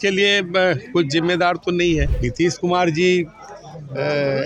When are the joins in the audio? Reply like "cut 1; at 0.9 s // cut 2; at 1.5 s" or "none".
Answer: cut 1; at 2.2 s